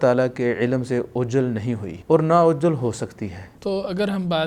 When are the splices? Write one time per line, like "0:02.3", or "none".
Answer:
0:01.9
0:03.5